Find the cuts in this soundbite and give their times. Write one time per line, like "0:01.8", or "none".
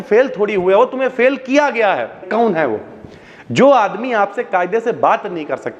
0:02.2